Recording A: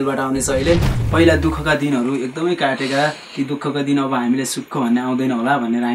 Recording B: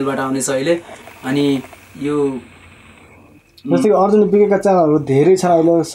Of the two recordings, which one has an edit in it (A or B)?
A